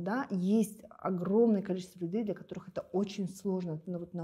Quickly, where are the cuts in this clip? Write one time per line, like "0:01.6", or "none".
none